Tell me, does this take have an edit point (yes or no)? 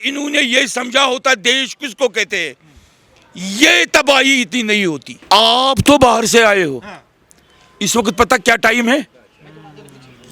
yes